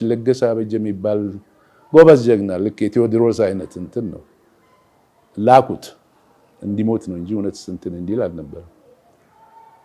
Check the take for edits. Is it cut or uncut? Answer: uncut